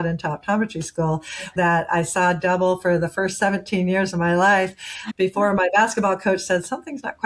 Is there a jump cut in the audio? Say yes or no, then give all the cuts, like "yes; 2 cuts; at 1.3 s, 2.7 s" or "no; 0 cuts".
yes; 1 cut; at 1.4 s